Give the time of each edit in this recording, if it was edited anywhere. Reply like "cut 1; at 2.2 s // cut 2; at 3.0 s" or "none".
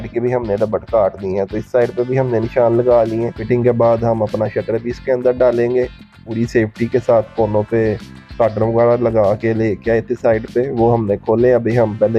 cut 1; at 3.4 s // cut 2; at 6.2 s